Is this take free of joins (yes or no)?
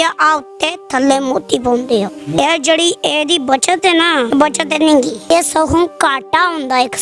no